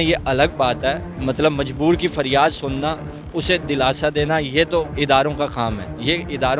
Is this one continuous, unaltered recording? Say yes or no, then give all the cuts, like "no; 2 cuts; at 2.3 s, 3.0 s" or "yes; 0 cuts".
no; 2 cuts; at 1.1 s, 4.9 s